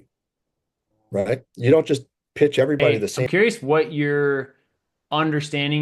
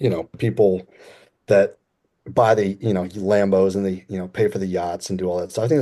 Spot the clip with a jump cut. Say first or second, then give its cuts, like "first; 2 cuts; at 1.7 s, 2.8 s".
first; 1 cut; at 3.3 s